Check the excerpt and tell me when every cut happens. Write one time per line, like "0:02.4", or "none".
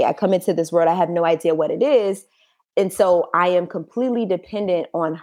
none